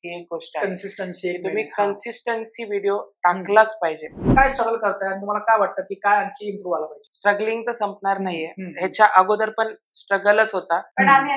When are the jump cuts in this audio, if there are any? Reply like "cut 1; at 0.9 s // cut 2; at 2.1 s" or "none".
cut 1; at 4.3 s // cut 2; at 7.0 s